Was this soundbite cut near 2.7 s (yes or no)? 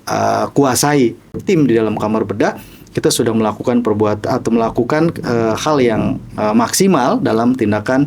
no